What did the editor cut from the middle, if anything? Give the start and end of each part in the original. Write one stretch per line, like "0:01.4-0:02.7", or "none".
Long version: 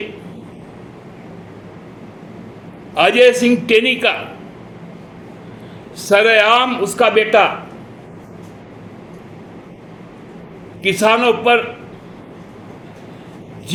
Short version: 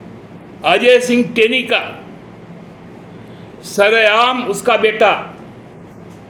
none